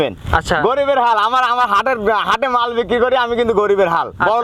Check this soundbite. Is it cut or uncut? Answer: uncut